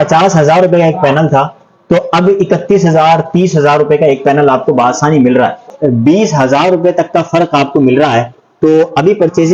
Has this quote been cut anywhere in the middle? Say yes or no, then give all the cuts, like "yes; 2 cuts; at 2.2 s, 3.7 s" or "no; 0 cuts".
yes; 1 cut; at 5.6 s